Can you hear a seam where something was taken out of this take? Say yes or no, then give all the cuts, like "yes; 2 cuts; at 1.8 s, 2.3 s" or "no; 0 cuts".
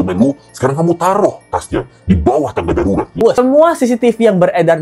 yes; 1 cut; at 3.4 s